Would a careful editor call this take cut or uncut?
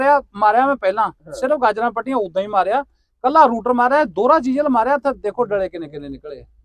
uncut